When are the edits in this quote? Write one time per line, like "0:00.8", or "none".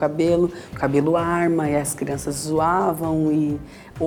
none